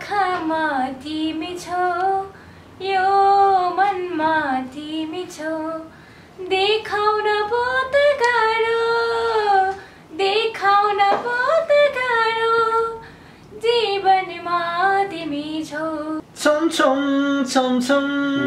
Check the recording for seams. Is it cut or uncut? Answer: cut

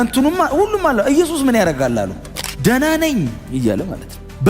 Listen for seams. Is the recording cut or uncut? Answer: cut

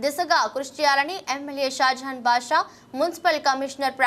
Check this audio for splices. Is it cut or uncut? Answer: uncut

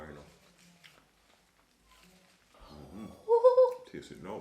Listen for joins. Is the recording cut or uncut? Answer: cut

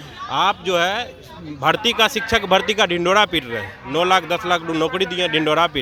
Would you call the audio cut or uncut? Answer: uncut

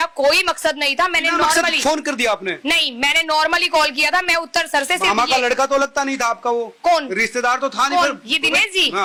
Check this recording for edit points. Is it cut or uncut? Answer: uncut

